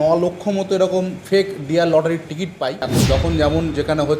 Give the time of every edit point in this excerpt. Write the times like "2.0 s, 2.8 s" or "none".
3.0 s